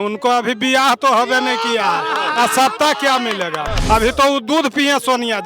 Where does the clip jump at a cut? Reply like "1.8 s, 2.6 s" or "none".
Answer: 3.7 s